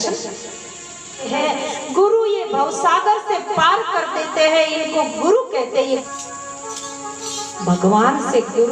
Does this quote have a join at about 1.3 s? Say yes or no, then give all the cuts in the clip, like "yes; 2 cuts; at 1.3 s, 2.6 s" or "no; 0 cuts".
yes; 2 cuts; at 1.3 s, 6.0 s